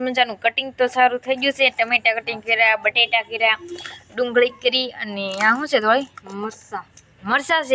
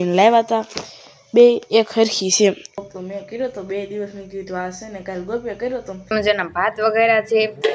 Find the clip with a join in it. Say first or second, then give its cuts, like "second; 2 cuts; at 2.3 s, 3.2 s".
second; 2 cuts; at 2.7 s, 6.1 s